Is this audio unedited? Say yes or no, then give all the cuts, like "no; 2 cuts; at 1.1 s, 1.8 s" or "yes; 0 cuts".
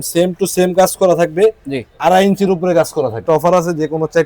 no; 1 cut; at 3.2 s